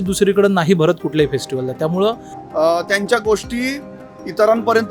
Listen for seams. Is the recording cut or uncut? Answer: cut